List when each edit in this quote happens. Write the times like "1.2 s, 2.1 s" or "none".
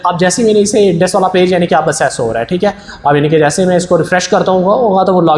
none